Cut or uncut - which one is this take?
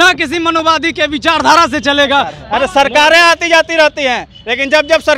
cut